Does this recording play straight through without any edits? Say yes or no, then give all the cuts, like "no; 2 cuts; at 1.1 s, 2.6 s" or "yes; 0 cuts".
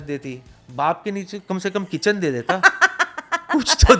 yes; 0 cuts